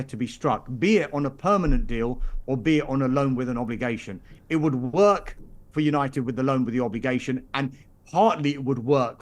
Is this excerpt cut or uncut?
uncut